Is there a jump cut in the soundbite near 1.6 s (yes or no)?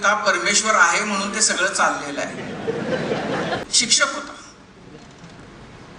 no